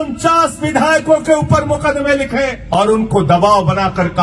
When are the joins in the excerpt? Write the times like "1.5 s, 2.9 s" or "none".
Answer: 2.6 s